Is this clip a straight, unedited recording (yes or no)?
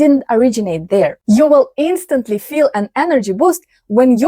no